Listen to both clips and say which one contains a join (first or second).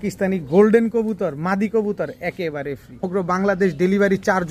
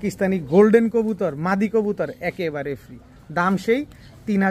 first